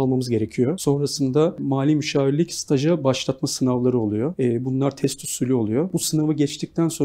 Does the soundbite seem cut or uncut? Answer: cut